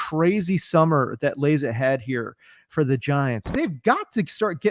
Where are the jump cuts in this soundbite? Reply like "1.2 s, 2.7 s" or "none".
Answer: 3.5 s